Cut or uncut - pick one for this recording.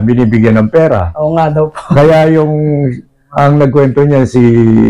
uncut